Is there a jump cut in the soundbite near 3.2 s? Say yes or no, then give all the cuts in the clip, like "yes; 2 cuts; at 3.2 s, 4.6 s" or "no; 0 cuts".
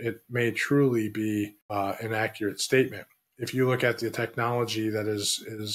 no; 1 cut; at 1.6 s